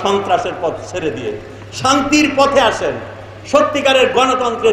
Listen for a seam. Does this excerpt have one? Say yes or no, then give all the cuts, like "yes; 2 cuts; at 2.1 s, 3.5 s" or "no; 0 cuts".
no; 0 cuts